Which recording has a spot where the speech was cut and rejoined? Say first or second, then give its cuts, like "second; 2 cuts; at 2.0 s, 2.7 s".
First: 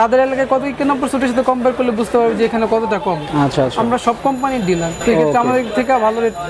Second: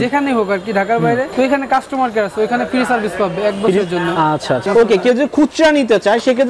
second; 1 cut; at 4.6 s